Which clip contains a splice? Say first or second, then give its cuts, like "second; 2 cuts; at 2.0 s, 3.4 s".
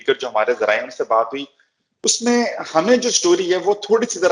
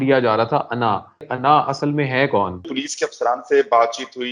second; 2 cuts; at 1.3 s, 2.7 s